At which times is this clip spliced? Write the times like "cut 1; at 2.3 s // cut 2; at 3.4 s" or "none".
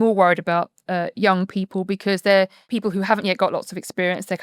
cut 1; at 2.6 s